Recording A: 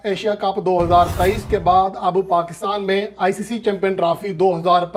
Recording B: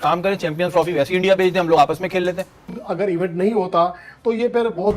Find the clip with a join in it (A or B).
B